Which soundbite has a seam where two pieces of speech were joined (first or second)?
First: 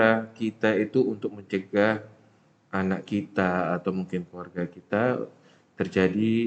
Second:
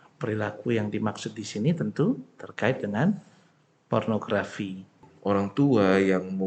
second